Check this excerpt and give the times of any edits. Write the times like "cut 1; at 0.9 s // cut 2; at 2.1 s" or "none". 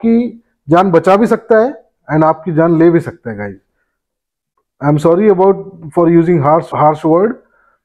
cut 1; at 6.7 s